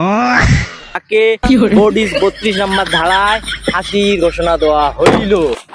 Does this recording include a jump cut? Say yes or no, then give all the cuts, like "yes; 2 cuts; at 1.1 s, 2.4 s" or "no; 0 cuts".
yes; 1 cut; at 0.9 s